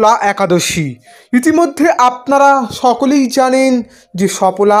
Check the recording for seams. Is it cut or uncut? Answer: uncut